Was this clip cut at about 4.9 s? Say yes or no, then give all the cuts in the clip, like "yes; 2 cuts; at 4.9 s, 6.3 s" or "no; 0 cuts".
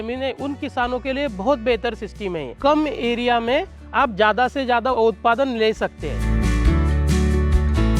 yes; 3 cuts; at 2.5 s, 4.9 s, 6.1 s